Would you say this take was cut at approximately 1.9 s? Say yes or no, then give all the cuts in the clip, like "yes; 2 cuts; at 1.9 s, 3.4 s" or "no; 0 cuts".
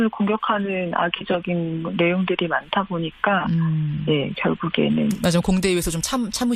yes; 1 cut; at 1.9 s